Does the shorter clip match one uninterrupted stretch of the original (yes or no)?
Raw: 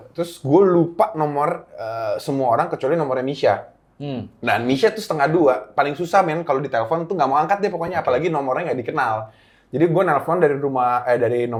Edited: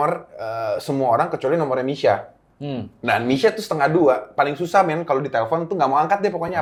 yes